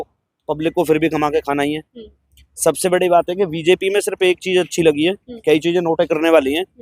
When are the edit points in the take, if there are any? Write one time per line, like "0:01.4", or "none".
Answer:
none